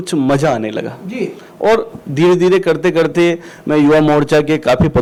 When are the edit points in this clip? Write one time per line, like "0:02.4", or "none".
none